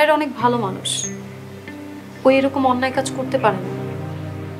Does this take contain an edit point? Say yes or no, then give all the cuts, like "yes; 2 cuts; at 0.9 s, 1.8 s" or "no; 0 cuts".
yes; 1 cut; at 3.6 s